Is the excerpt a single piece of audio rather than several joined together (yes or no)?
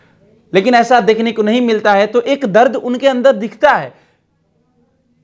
yes